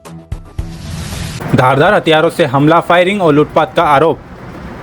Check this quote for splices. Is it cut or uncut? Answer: uncut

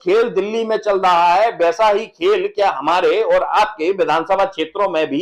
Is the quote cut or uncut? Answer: uncut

